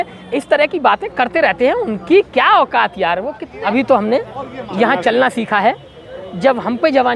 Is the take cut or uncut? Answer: cut